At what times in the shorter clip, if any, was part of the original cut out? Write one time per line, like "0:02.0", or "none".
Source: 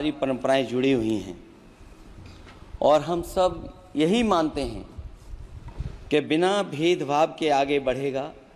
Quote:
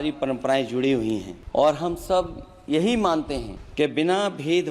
0:01.4
0:03.6